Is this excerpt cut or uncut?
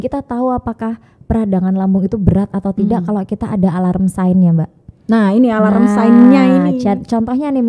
uncut